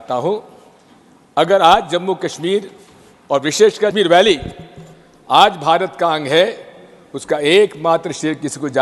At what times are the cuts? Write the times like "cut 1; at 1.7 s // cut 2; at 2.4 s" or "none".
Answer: cut 1; at 3.9 s